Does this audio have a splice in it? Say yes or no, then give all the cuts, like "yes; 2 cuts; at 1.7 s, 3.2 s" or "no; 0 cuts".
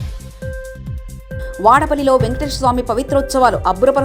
no; 0 cuts